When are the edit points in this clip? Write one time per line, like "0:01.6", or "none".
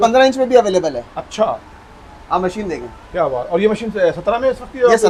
none

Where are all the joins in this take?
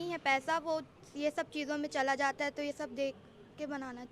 none

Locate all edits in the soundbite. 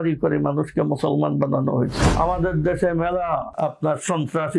0:02.0
0:03.5

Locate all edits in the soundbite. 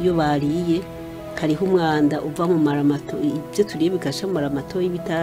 none

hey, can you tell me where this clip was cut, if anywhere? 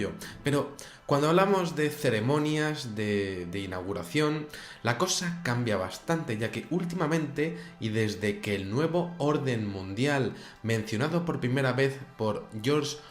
0:02.1

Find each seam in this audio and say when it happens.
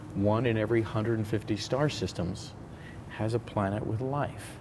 none

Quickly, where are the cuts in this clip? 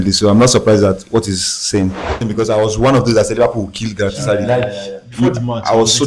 0:02.3

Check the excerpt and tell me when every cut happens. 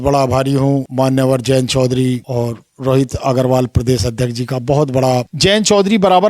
0:00.9
0:02.2
0:05.3

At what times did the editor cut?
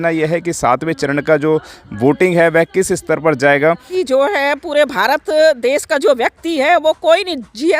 0:03.9

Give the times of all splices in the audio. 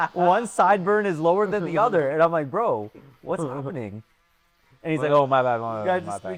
none

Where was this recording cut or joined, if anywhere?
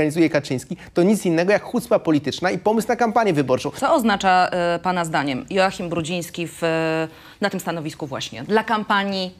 0:03.7

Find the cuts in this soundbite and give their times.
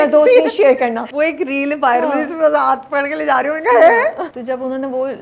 0:01.0
0:04.3

